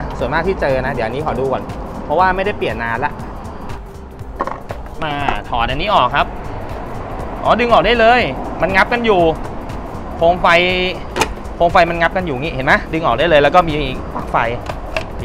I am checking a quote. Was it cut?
no; 0 cuts

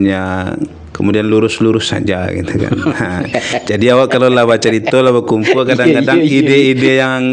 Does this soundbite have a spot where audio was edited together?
no; 0 cuts

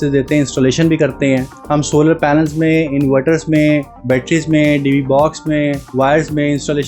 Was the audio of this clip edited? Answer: yes; 3 cuts; at 1.5 s, 3.9 s, 5.8 s

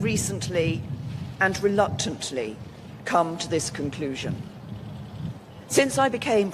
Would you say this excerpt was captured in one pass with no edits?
no; 1 cut; at 3.1 s

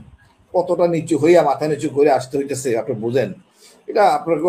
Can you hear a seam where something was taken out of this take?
no; 0 cuts

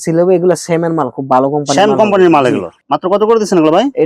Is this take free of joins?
yes; 0 cuts

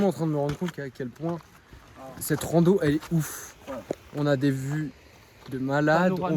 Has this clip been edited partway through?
no; 0 cuts

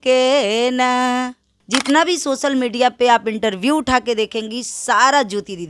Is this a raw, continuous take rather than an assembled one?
no; 1 cut; at 1.5 s

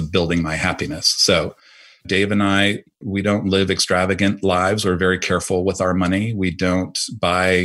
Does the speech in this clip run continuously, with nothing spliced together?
no; 1 cut; at 2.1 s

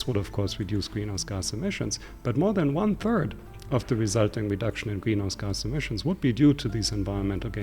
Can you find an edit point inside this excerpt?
no; 0 cuts

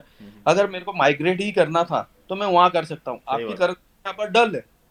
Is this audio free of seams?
yes; 0 cuts

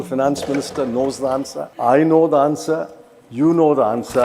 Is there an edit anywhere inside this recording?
yes; 1 cut; at 1.6 s

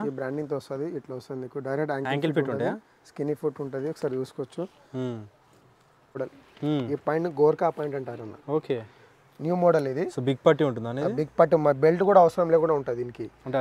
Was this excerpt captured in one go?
no; 1 cut; at 6.2 s

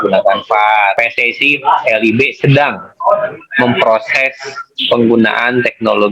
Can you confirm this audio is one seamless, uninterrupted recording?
no; 1 cut; at 0.9 s

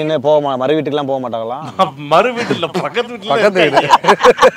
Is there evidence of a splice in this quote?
no; 0 cuts

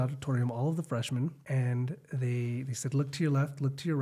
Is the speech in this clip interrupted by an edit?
yes; 1 cut; at 1.4 s

